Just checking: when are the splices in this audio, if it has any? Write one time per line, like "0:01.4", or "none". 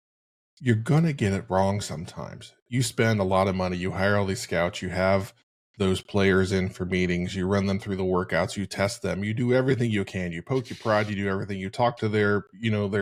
none